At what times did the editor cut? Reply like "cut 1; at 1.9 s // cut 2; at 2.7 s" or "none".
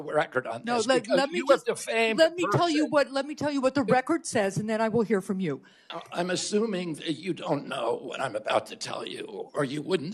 cut 1; at 5.8 s